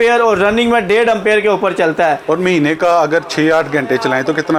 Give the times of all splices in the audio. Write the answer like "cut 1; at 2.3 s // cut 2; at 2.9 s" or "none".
none